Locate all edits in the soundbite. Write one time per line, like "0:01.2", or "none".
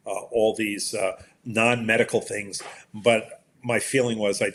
none